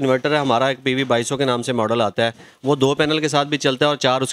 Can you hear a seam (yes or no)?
no